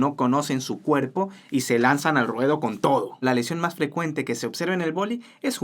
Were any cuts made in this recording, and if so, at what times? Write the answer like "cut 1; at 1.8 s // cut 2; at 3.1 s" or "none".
cut 1; at 3.2 s